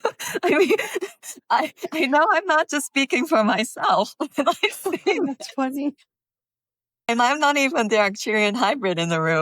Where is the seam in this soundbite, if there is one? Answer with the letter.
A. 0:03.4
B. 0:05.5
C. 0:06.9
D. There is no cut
C